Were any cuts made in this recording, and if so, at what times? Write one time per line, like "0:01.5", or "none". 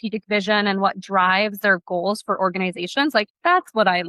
none